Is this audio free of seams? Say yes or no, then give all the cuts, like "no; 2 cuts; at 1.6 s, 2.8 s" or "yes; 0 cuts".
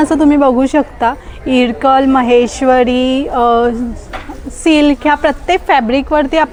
yes; 0 cuts